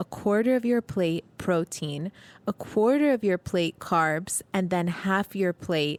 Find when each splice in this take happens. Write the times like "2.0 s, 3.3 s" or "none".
none